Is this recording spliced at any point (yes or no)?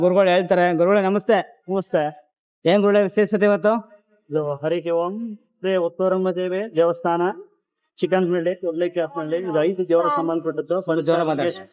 no